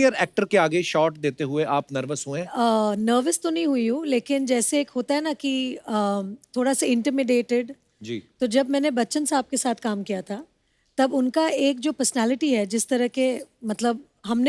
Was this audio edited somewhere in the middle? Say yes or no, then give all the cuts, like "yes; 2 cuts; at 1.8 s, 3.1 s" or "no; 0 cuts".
yes; 1 cut; at 2.5 s